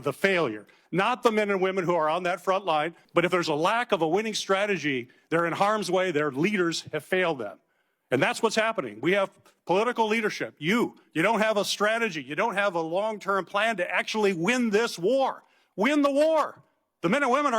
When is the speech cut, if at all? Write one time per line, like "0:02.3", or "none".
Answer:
0:03.0